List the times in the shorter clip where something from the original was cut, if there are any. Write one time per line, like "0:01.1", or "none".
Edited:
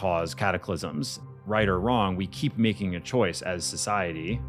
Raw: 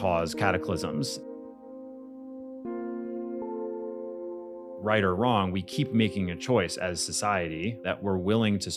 0:01.3